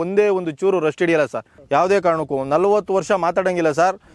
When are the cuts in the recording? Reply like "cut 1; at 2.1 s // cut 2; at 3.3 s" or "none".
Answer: none